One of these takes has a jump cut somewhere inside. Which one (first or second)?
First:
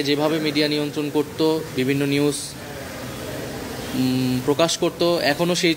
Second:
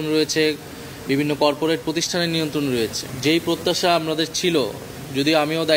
second